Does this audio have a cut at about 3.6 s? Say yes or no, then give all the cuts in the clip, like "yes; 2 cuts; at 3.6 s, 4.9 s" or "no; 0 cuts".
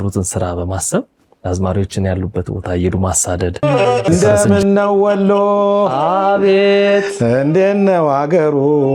yes; 1 cut; at 3.6 s